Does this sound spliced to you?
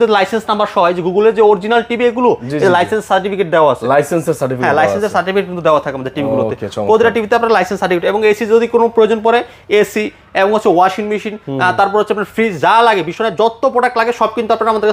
no; 0 cuts

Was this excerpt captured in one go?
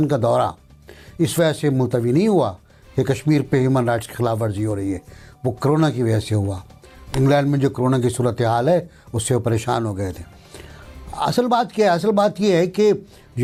yes; 0 cuts

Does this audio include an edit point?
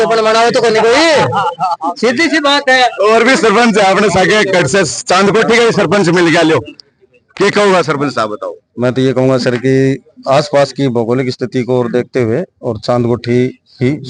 no; 0 cuts

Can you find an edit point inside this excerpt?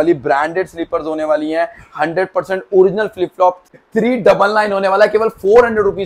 yes; 1 cut; at 3.7 s

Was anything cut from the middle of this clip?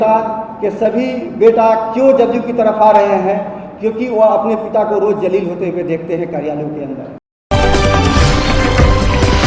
yes; 1 cut; at 7.3 s

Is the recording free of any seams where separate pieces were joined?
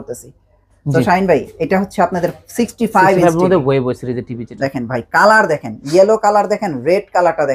yes; 0 cuts

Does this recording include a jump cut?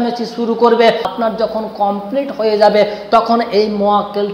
yes; 1 cut; at 1.1 s

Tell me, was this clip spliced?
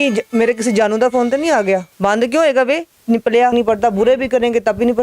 yes; 2 cuts; at 1.9 s, 3.5 s

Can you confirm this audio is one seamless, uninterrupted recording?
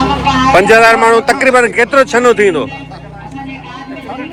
yes; 0 cuts

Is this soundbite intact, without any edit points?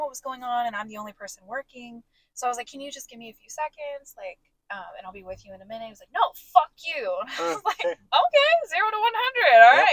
yes; 0 cuts

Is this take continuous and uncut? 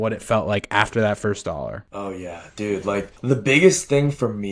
yes; 0 cuts

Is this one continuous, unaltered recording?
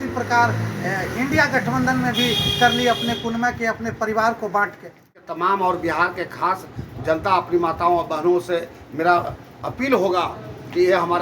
no; 1 cut; at 5.2 s

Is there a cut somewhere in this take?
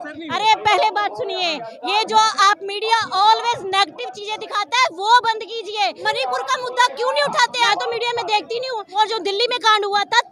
yes; 3 cuts; at 6.0 s, 7.7 s, 8.9 s

